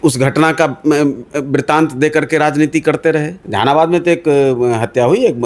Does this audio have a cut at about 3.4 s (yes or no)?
yes